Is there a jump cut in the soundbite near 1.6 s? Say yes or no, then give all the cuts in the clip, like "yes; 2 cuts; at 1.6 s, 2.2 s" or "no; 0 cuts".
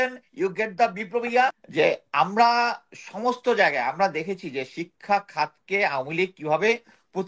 yes; 1 cut; at 1.6 s